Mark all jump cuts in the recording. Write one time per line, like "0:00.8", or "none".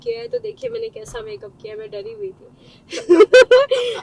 none

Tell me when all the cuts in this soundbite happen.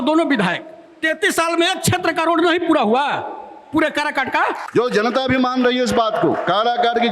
0:04.6

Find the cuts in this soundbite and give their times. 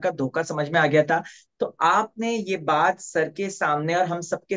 none

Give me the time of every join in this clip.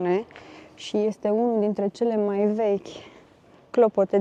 none

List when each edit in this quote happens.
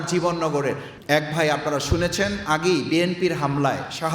0:00.9

